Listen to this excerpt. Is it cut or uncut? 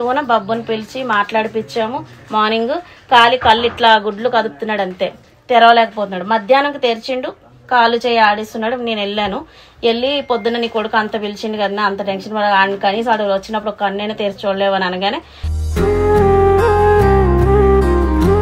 uncut